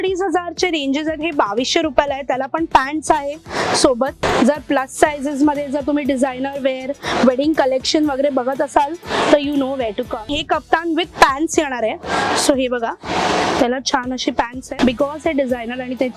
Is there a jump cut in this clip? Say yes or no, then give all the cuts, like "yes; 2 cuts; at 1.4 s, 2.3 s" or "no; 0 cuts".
yes; 3 cuts; at 4.2 s, 10.2 s, 14.8 s